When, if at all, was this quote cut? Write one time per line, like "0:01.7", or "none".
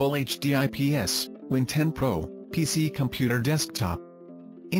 none